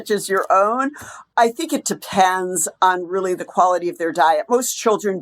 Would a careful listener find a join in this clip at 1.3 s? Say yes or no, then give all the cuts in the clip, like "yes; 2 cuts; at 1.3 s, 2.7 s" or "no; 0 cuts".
yes; 1 cut; at 1.3 s